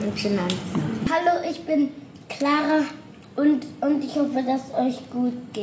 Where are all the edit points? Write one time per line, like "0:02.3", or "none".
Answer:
0:01.1